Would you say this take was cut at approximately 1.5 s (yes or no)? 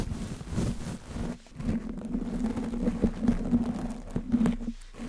yes